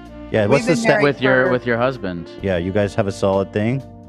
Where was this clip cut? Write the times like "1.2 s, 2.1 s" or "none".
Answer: none